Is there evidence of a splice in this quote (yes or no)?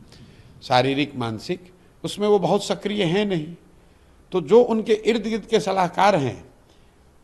no